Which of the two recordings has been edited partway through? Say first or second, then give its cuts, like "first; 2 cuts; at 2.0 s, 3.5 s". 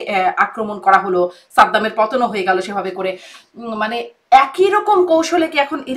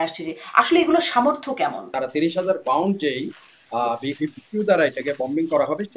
second; 1 cut; at 1.9 s